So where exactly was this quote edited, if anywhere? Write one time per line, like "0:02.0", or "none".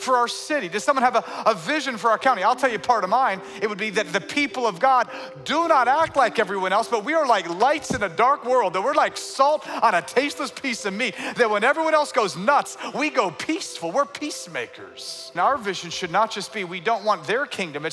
0:15.3